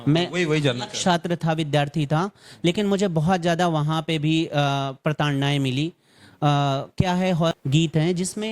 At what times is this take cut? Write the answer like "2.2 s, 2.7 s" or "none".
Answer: 7.6 s